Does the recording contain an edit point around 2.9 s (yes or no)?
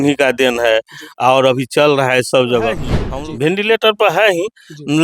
yes